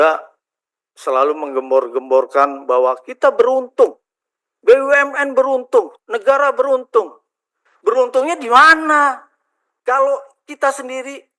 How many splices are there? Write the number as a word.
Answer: zero